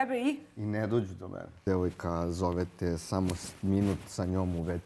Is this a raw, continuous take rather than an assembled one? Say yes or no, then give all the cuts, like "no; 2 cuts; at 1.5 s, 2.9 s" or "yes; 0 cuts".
no; 1 cut; at 1.6 s